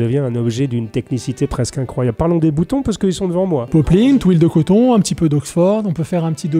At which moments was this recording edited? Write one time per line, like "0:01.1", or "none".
0:03.7